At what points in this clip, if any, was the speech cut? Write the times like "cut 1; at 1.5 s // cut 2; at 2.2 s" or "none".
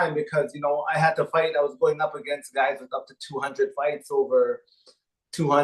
none